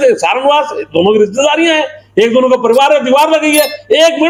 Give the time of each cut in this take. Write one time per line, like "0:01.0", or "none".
none